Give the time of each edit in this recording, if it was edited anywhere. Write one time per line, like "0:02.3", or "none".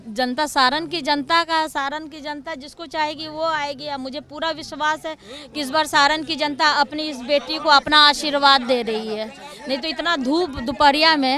none